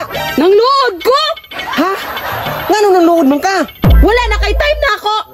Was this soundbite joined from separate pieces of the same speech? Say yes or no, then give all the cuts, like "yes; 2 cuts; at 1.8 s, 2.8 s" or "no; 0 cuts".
no; 0 cuts